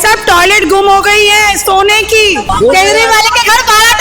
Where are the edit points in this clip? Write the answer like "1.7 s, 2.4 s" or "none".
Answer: 2.5 s

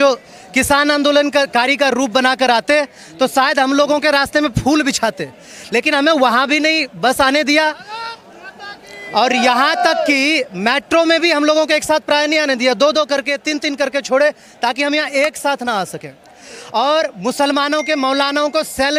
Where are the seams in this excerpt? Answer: none

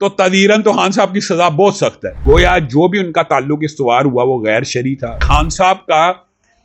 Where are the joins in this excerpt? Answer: 2.1 s, 5.2 s

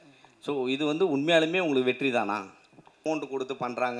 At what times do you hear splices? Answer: 3.0 s

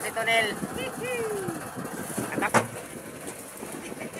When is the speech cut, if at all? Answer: 2.5 s

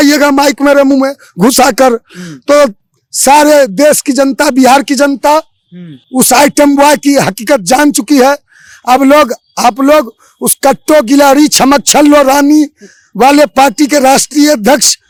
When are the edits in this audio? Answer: none

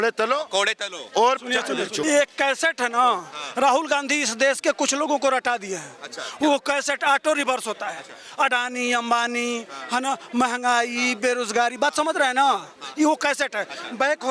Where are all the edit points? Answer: 2.0 s

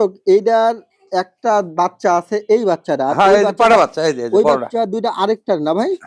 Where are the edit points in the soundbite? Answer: none

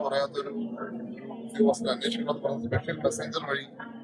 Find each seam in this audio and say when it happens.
none

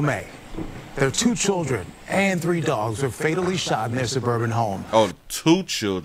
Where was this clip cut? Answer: none

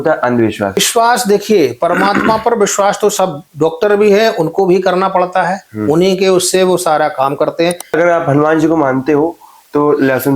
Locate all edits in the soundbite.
0.8 s, 7.9 s

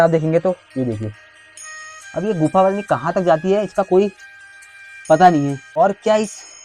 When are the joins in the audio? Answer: 5.7 s

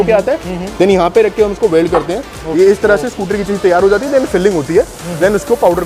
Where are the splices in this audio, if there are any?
2.4 s

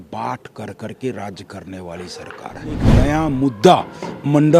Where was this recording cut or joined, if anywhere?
2.9 s

